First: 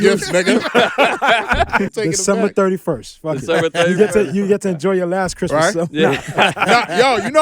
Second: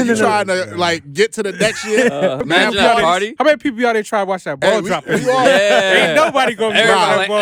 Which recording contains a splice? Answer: first; 1 cut; at 1.9 s

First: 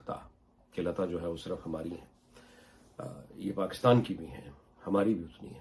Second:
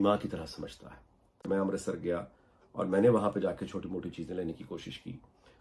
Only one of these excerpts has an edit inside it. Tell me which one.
second; 1 cut; at 1.5 s

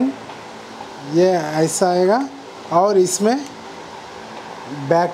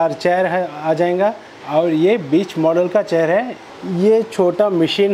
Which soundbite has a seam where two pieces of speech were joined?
second; 2 cuts; at 1.5 s, 3.6 s

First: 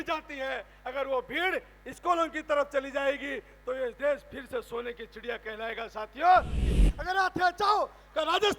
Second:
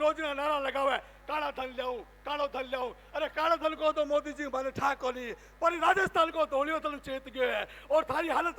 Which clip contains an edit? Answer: first; 1 cut; at 6.7 s

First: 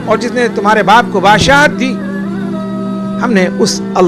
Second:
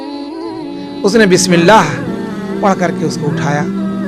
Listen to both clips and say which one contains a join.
first; 2 cuts; at 1.9 s, 3.2 s

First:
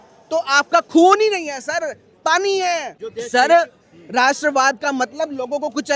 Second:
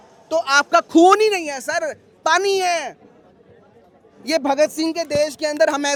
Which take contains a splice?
first; 1 cut; at 3.0 s

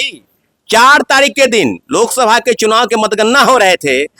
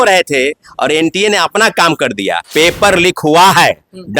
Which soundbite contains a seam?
second; 1 cut; at 2.4 s

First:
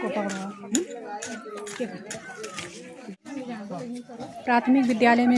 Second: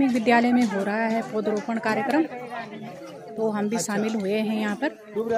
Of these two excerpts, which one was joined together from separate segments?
first; 1 cut; at 3.2 s

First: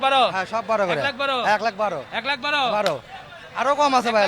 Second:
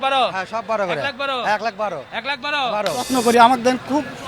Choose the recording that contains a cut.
second; 1 cut; at 3.1 s

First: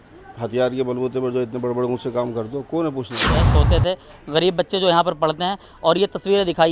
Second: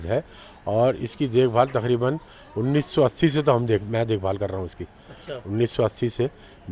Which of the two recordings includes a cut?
first; 1 cut; at 3.4 s

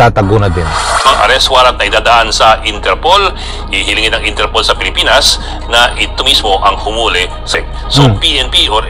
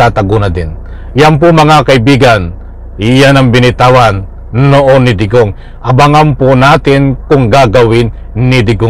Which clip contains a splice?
first; 2 cuts; at 1.0 s, 7.5 s

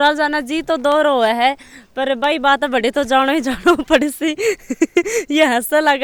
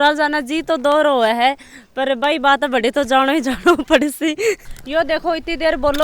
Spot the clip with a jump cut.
second; 1 cut; at 4.7 s

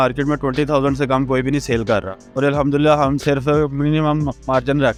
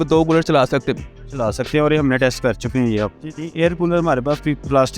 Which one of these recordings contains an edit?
second; 1 cut; at 3.3 s

